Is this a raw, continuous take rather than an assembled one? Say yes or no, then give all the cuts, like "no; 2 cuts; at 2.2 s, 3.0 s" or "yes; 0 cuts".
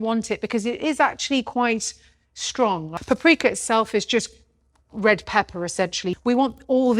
no; 2 cuts; at 2.9 s, 6.1 s